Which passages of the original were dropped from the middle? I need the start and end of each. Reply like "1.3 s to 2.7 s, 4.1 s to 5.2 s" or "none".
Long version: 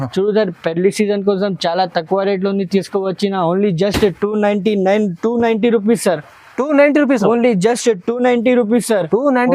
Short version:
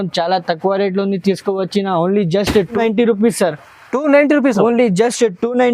4.2 s to 5.4 s